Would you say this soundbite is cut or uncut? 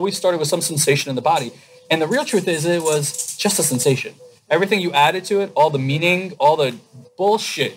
uncut